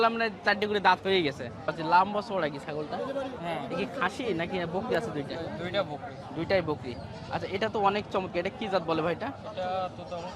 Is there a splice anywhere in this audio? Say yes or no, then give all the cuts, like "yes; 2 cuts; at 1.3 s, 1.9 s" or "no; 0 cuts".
yes; 1 cut; at 1.7 s